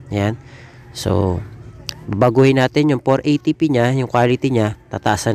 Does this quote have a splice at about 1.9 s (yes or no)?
no